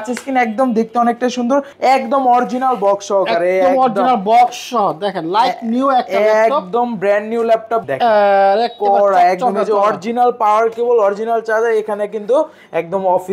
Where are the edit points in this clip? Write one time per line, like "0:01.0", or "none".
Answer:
0:01.7
0:07.9

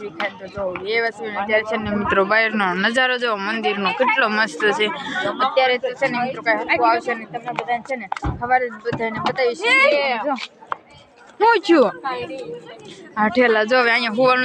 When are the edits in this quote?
none

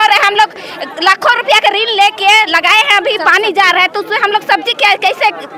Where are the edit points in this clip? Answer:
none

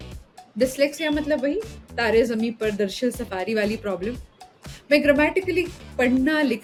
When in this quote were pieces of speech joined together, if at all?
none

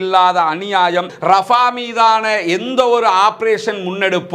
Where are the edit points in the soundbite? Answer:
0:01.1

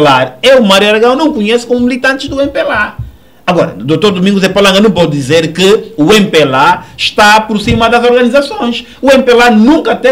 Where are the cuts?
none

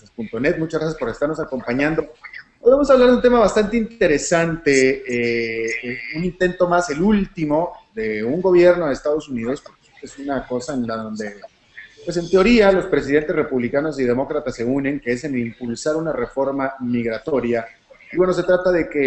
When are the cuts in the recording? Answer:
none

